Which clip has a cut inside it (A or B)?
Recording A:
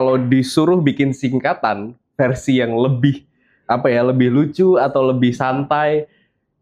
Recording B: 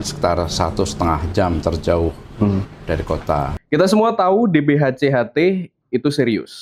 B